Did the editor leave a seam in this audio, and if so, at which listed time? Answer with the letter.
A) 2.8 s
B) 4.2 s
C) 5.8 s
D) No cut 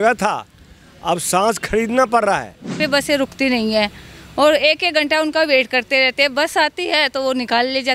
A